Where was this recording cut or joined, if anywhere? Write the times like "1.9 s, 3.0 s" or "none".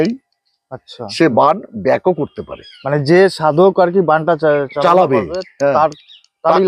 none